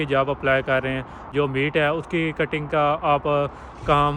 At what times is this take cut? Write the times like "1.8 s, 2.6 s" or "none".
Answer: 1.3 s